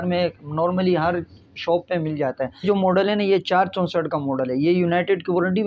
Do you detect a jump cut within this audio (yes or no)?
yes